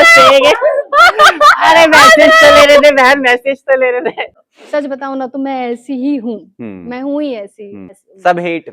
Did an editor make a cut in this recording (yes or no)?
yes